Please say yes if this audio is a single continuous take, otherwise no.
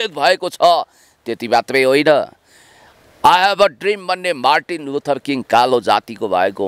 yes